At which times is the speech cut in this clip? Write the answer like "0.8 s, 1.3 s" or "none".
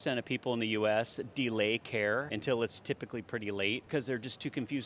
2.3 s, 3.8 s